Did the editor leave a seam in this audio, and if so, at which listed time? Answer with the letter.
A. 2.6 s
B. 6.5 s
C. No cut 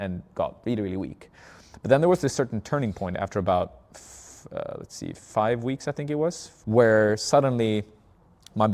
B